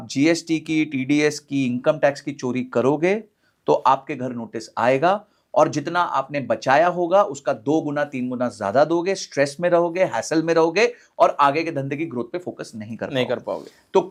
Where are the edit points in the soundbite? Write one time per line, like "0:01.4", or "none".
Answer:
none